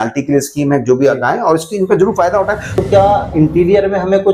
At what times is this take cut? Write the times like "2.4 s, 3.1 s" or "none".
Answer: 2.7 s

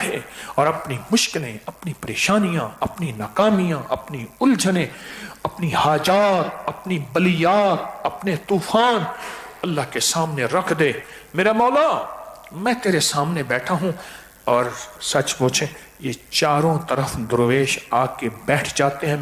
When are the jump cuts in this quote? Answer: none

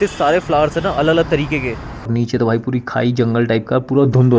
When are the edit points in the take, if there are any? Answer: 2.1 s

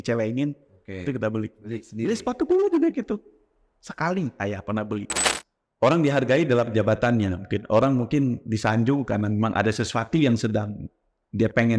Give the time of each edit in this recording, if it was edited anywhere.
5.1 s

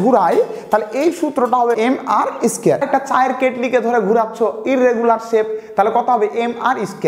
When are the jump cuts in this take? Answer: 1.8 s, 2.8 s

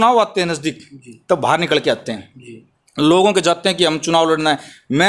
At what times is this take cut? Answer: none

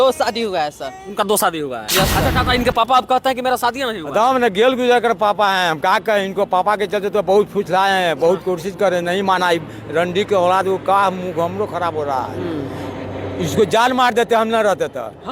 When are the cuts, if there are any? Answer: 2.2 s

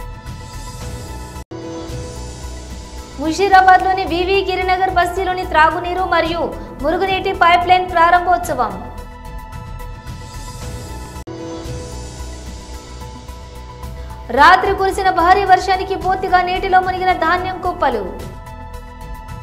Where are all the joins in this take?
1.4 s, 3.1 s, 8.9 s, 11.0 s, 12.8 s, 14.3 s, 18.3 s

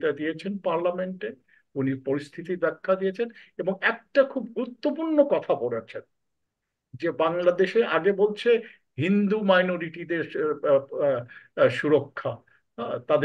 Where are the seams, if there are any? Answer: none

